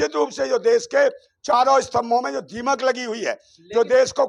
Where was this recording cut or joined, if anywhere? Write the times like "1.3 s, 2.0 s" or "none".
none